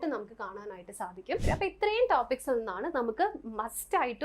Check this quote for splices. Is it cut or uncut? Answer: cut